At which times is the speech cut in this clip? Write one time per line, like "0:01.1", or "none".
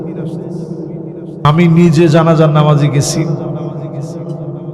0:01.4